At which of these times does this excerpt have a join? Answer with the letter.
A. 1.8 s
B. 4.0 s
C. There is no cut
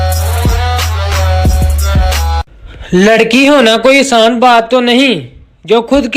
A